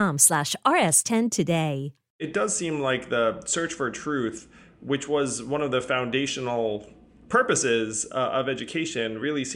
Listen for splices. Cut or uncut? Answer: cut